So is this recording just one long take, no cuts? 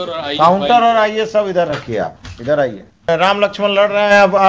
no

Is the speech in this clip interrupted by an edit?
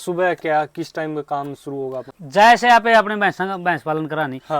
yes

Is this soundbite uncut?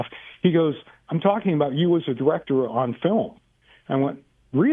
yes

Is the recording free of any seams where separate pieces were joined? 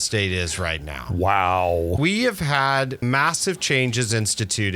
no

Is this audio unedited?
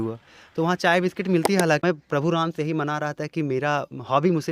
no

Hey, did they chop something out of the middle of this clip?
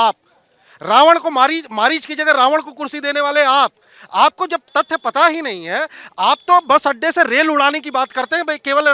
no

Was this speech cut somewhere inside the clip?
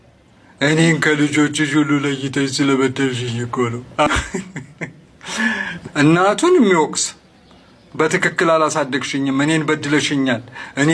yes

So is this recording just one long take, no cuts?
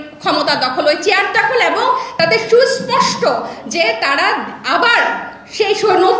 no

